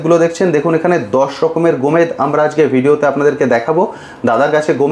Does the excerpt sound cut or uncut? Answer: uncut